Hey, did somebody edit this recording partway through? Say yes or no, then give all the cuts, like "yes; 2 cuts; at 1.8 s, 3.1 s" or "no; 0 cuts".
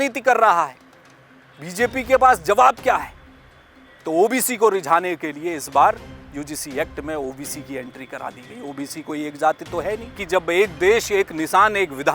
yes; 1 cut; at 10.2 s